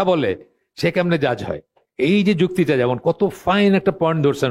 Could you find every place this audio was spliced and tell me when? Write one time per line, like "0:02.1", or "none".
none